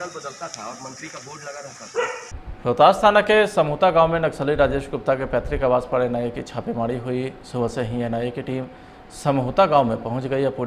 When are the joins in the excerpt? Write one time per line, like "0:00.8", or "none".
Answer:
0:02.5